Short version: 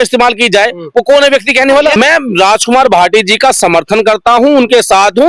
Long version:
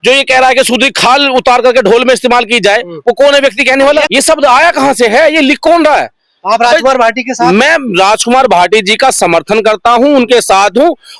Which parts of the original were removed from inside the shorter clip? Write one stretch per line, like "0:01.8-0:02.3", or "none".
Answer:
0:04.1-0:07.6